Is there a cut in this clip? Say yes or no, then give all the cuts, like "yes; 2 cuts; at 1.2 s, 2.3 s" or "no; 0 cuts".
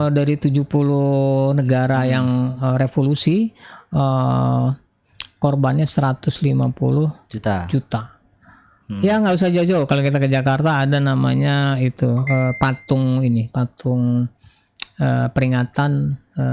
no; 0 cuts